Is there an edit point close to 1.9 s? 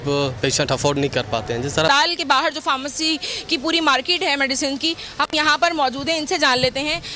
yes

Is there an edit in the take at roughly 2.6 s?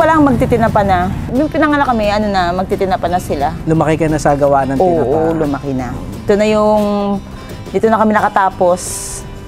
no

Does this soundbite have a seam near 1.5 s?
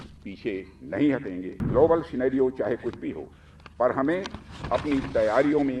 yes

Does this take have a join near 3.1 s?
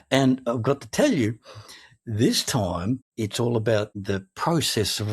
yes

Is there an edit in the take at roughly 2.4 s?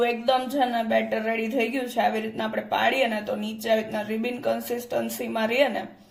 no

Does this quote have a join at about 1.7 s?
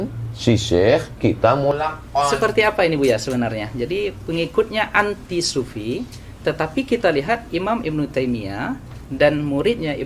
yes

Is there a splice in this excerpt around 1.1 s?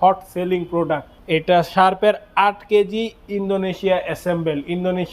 yes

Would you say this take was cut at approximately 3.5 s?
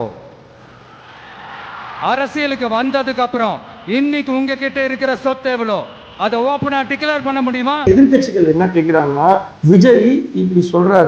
no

